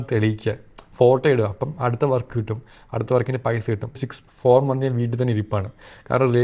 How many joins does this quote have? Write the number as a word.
one